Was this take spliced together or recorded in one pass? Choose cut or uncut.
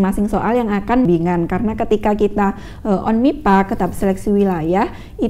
cut